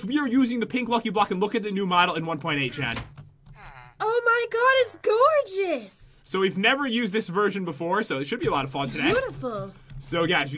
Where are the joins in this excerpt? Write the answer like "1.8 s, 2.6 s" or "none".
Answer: 1.1 s